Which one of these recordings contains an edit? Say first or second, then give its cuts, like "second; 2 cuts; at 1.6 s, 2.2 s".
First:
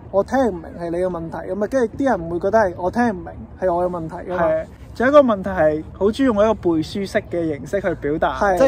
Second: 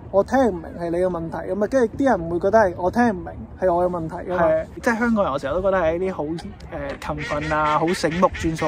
second; 1 cut; at 4.7 s